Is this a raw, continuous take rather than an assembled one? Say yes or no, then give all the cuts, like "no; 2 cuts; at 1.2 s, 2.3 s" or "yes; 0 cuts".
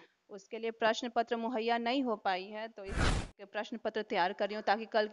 no; 1 cut; at 3.1 s